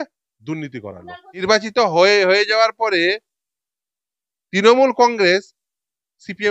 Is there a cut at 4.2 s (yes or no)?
no